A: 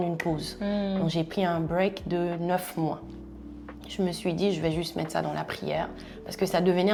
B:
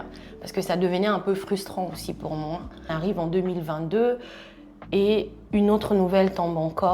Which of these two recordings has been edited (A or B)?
B